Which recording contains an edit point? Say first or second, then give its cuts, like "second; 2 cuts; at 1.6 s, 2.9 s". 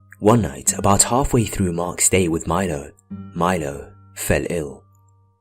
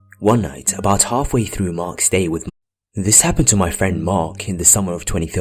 first; 1 cut; at 2.5 s